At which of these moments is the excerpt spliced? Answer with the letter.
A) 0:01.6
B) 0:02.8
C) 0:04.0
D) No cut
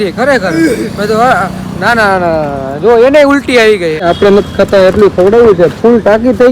C